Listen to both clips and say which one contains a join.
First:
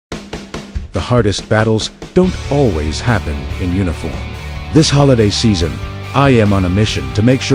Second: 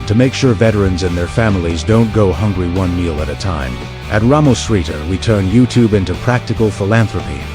second; 1 cut; at 2.1 s

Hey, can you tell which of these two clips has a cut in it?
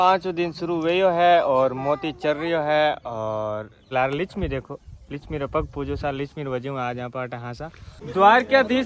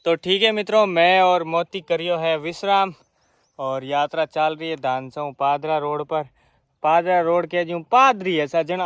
first; 2 cuts; at 3.9 s, 8.0 s

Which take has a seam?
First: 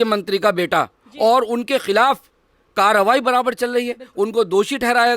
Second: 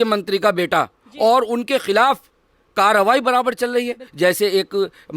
second; 1 cut; at 4.0 s

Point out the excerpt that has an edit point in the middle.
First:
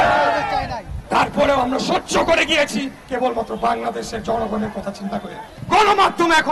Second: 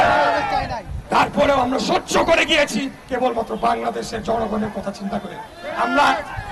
first; 1 cut; at 5.5 s

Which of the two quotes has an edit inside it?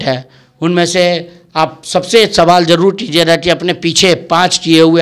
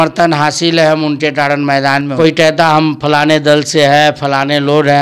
second; 1 cut; at 2.1 s

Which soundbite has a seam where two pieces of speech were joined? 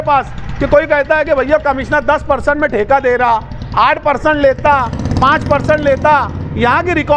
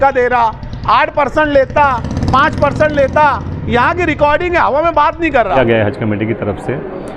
second; 1 cut; at 5.6 s

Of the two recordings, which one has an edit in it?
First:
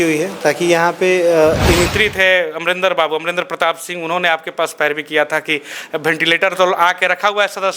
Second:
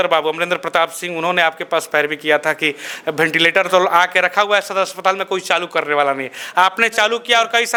first; 1 cut; at 1.9 s

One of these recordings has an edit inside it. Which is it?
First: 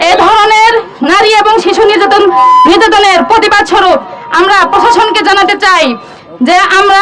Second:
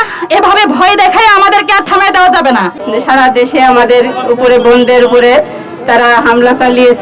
second; 1 cut; at 2.8 s

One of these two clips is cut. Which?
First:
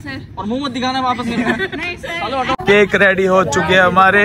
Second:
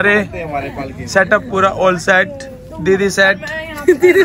first; 1 cut; at 2.6 s

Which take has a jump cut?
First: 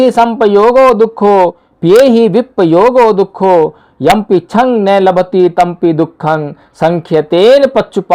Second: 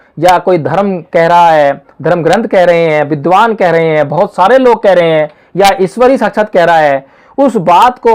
first; 1 cut; at 1.7 s

